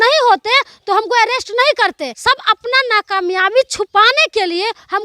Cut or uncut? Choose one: cut